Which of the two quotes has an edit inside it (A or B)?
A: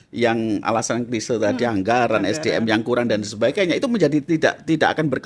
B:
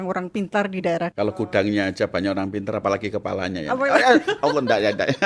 B